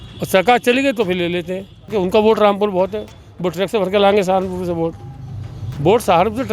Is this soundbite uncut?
no; 1 cut; at 1.9 s

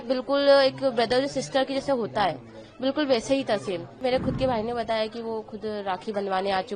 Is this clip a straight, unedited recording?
no; 1 cut; at 4.0 s

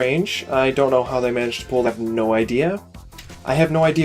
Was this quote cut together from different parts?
no; 0 cuts

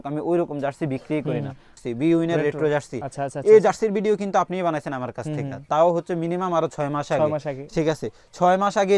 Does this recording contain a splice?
yes; 1 cut; at 1.8 s

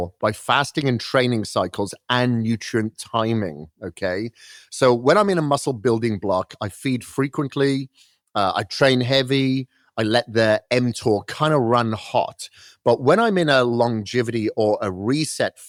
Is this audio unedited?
yes; 0 cuts

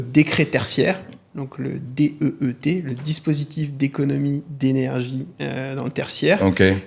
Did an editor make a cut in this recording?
no; 0 cuts

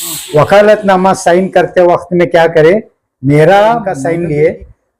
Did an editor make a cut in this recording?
yes; 1 cut; at 4.0 s

